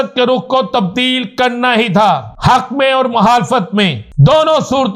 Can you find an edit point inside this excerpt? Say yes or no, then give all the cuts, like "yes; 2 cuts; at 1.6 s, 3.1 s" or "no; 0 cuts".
yes; 2 cuts; at 2.3 s, 4.0 s